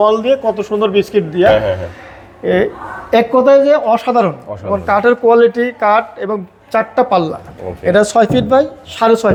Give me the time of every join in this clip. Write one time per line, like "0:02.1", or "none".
none